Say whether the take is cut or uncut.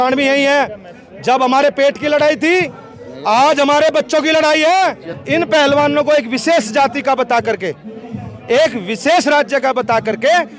cut